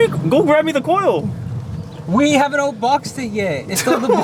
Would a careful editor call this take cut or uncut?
uncut